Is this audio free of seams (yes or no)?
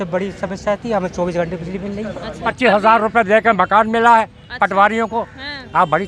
no